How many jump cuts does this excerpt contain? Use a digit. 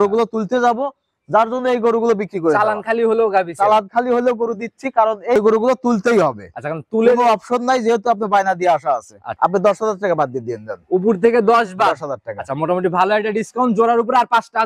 2